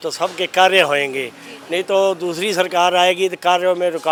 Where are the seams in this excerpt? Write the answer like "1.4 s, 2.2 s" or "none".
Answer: none